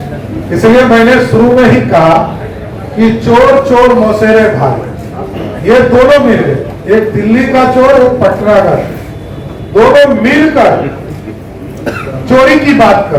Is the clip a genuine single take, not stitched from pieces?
yes; 0 cuts

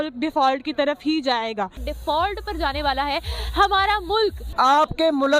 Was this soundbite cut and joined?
yes; 2 cuts; at 1.8 s, 4.4 s

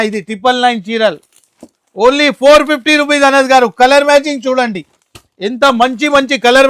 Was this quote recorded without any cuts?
yes; 0 cuts

